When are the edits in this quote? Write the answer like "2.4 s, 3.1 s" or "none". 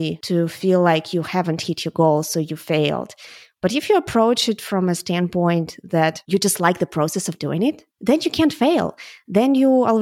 7.9 s